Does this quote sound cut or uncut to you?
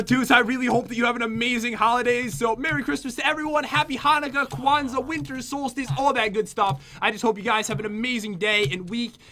cut